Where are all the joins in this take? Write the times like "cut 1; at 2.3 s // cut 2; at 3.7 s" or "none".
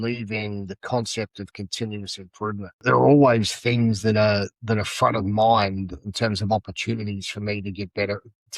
cut 1; at 2.8 s